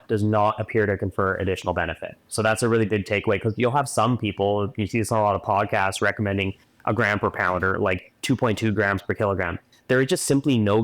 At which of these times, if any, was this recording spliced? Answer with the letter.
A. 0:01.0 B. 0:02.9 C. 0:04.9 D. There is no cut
D